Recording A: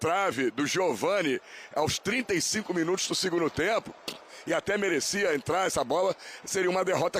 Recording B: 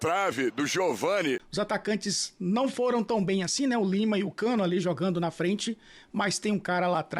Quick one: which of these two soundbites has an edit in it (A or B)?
B